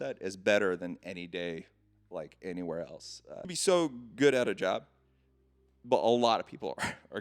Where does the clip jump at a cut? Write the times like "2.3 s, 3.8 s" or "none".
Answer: 3.5 s